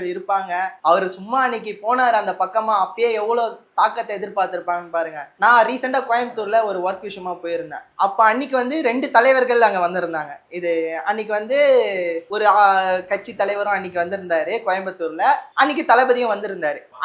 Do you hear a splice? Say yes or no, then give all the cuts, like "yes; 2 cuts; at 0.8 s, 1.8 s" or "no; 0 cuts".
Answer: no; 0 cuts